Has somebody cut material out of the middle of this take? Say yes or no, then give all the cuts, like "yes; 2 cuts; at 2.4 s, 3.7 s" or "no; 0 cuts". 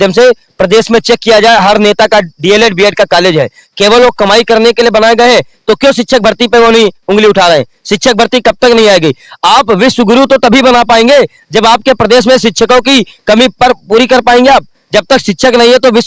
no; 0 cuts